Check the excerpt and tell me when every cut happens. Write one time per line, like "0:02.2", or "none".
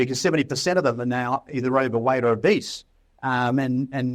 none